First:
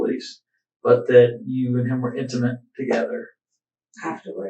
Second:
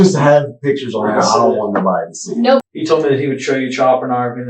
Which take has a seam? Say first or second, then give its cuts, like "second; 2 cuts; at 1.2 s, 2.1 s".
second; 1 cut; at 2.6 s